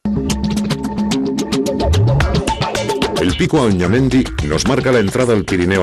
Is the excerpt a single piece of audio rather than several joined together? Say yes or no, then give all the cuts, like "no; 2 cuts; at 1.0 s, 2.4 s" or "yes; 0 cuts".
yes; 0 cuts